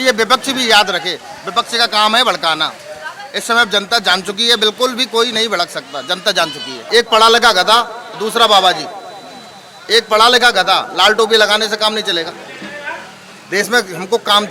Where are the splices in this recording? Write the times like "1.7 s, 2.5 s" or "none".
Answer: 6.8 s